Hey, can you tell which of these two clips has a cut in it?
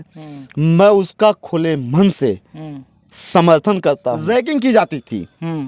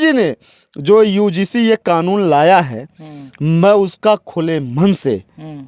first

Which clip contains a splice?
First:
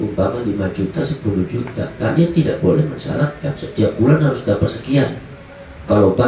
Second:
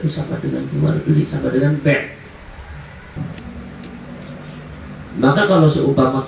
second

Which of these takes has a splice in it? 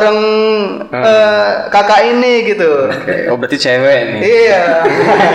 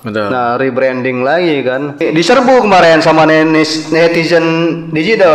second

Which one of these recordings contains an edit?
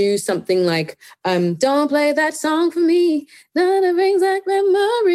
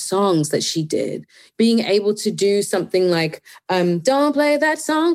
second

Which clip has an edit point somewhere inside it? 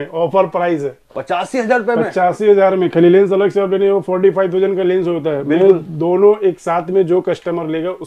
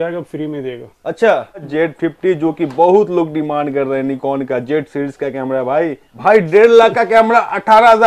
second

